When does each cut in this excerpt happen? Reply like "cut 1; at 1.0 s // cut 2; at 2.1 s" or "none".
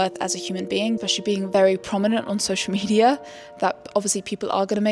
cut 1; at 1.0 s

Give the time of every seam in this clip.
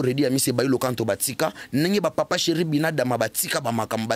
none

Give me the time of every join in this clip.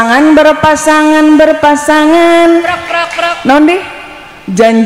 none

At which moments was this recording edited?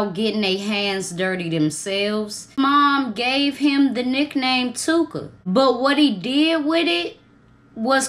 cut 1; at 2.6 s

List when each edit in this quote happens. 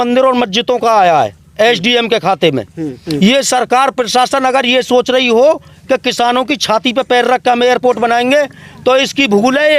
cut 1; at 3.0 s

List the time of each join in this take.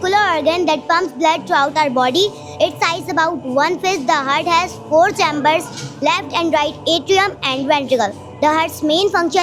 none

